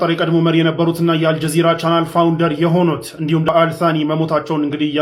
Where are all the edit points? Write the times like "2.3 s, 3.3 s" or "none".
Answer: 3.5 s